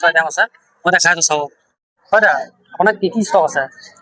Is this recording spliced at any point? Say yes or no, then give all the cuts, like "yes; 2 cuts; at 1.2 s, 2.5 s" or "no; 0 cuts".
no; 0 cuts